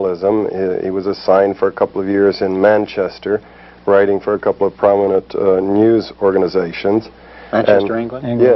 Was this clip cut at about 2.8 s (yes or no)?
yes